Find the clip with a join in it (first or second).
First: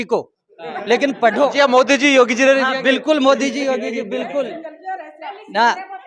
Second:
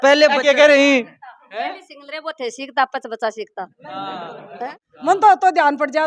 second